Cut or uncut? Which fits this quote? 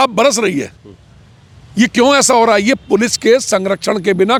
uncut